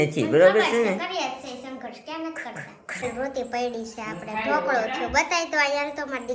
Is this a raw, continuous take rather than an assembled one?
no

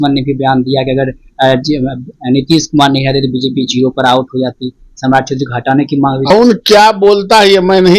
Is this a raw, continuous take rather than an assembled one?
no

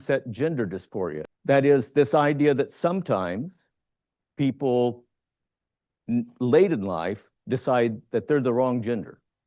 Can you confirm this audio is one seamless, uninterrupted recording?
no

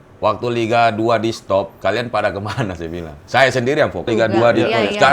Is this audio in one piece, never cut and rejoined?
no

